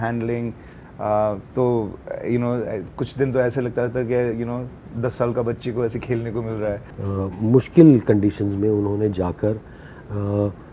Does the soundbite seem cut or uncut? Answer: cut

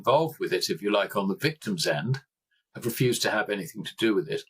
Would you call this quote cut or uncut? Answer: uncut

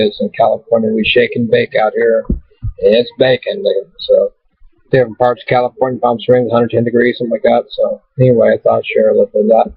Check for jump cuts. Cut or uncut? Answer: cut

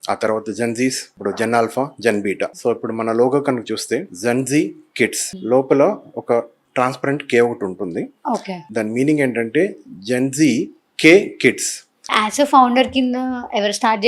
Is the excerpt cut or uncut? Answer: cut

